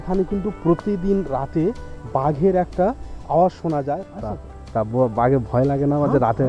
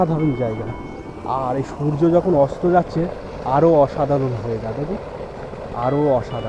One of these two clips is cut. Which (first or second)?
first